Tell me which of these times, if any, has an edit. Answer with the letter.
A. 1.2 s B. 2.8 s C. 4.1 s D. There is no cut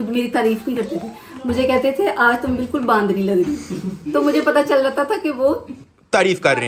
D